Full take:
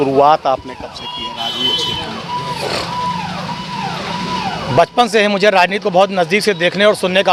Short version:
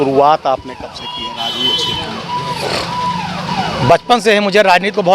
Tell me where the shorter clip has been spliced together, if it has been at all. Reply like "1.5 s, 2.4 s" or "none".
3.5 s